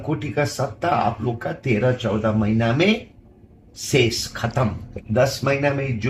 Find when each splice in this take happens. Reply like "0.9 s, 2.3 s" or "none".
4.9 s